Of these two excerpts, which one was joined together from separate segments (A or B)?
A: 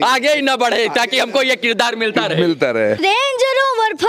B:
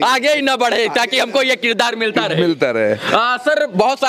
A